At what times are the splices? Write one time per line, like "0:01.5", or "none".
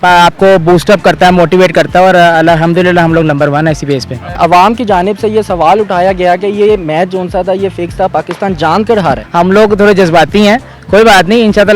0:04.4
0:09.2